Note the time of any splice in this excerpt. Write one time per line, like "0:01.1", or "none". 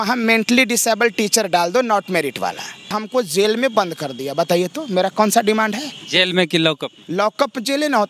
0:02.9